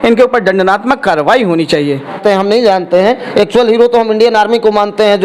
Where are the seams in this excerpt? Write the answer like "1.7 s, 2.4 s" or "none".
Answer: 2.2 s